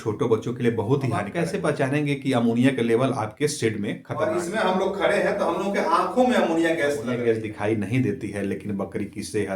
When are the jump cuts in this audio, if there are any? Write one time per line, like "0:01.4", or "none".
0:01.3
0:04.1
0:07.2